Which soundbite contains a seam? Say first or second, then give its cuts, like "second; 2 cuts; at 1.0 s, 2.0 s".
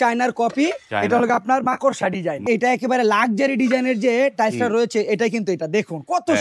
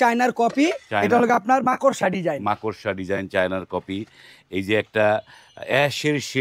first; 1 cut; at 2.4 s